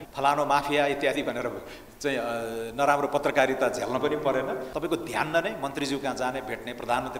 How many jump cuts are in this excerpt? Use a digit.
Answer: 1